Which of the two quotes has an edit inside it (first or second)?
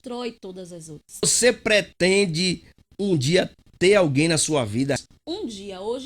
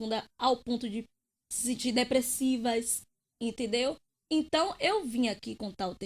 first